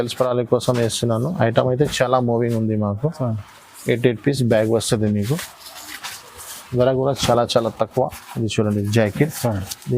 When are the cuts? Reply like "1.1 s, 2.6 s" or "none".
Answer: none

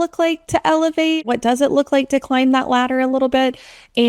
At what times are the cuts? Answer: 1.2 s

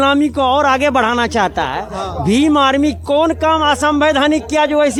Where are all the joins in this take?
none

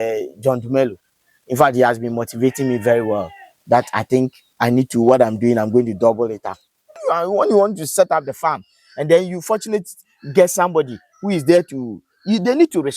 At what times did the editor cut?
7.0 s

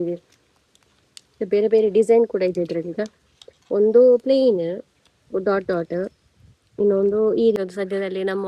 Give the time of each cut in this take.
7.6 s

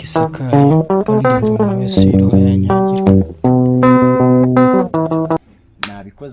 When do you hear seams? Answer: 5.4 s

